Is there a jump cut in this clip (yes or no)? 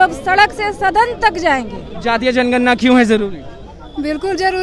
no